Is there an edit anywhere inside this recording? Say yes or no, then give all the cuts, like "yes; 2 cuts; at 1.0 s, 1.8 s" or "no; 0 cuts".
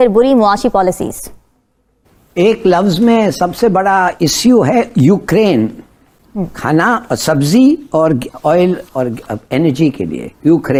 no; 0 cuts